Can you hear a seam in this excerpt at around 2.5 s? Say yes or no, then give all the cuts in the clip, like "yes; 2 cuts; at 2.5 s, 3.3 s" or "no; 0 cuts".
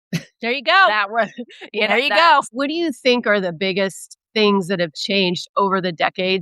yes; 1 cut; at 2.5 s